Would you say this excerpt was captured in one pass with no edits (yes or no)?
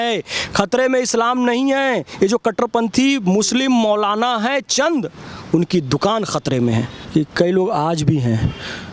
yes